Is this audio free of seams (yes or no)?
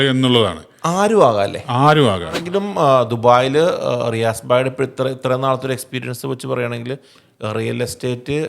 no